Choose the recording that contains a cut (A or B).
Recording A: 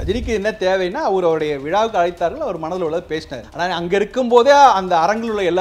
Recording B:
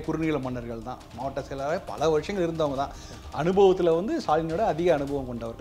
A